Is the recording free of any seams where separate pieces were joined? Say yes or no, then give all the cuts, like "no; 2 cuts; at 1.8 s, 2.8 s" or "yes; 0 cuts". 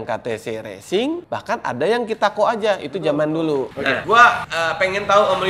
no; 3 cuts; at 1.2 s, 3.9 s, 4.5 s